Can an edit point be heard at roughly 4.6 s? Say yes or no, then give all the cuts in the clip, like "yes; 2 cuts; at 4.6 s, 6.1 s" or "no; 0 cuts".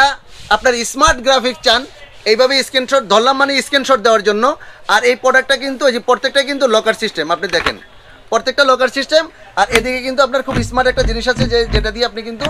no; 0 cuts